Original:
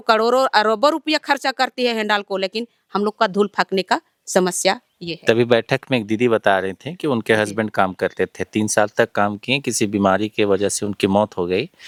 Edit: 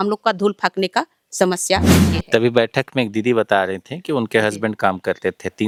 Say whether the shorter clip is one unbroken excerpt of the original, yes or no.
yes